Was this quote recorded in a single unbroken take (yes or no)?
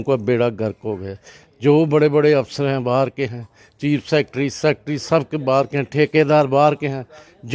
yes